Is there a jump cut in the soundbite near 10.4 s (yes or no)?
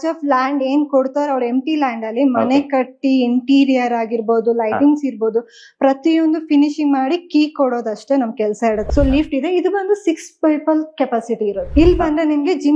no